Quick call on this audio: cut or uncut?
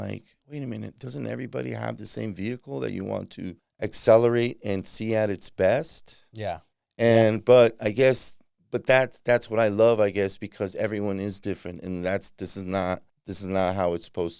uncut